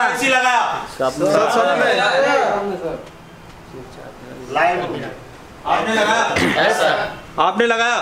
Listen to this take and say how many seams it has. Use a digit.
0